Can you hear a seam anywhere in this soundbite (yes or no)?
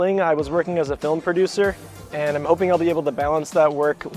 no